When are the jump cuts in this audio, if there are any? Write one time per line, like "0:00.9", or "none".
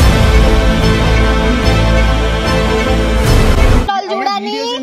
none